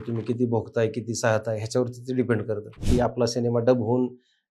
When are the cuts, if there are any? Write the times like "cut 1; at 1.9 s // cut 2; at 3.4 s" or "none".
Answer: cut 1; at 2.8 s